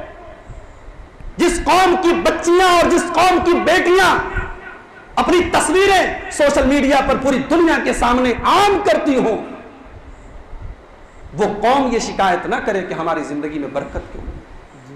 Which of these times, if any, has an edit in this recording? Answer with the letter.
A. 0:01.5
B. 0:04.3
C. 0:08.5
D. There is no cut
D